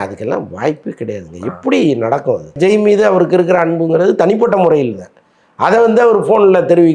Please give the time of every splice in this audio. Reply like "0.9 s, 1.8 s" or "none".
2.6 s